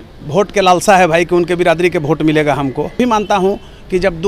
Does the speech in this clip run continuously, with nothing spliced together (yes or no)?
no